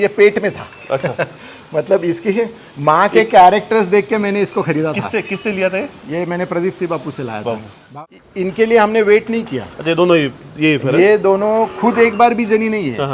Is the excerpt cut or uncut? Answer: cut